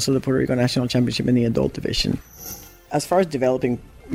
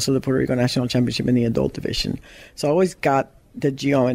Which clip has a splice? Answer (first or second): first